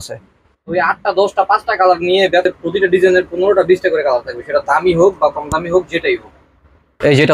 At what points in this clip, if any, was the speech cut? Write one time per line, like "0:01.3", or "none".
0:02.5